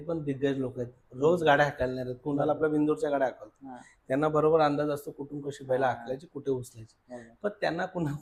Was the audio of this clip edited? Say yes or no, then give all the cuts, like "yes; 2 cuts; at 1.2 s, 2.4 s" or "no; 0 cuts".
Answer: no; 0 cuts